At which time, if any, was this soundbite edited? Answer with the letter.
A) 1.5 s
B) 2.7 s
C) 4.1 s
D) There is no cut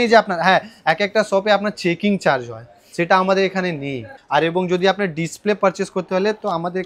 C